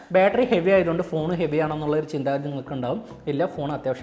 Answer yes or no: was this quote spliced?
no